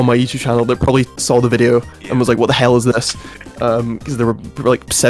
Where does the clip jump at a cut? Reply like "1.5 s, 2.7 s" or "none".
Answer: 1.2 s